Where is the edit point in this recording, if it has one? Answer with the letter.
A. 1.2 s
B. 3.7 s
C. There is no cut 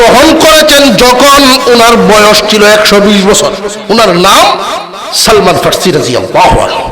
B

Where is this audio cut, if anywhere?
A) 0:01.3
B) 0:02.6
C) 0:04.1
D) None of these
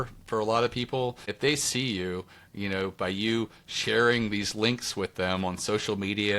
A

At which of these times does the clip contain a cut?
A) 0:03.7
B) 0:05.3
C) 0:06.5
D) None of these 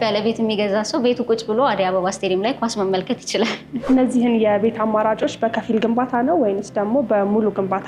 A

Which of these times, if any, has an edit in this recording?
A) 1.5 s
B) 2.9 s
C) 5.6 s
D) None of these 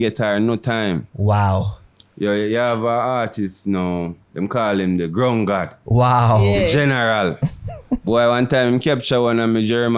D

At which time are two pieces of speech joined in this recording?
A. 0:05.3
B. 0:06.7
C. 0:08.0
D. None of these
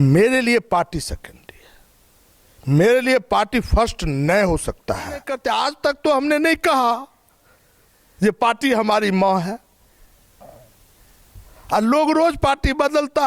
A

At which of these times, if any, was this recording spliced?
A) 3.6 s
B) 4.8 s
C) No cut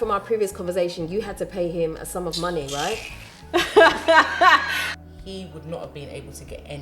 B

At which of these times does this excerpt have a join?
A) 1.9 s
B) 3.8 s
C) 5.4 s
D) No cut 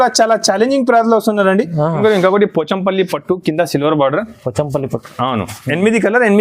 A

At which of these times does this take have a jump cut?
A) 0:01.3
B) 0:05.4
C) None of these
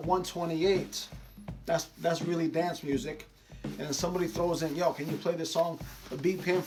C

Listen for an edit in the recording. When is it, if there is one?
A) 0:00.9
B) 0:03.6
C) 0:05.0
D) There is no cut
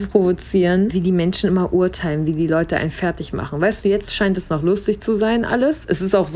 A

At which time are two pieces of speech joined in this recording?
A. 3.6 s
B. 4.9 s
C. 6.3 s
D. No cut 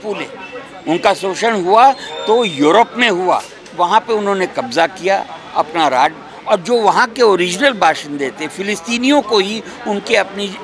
A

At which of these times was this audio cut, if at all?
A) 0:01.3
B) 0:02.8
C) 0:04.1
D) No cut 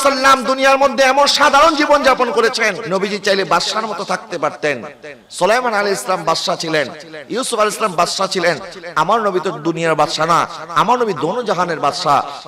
B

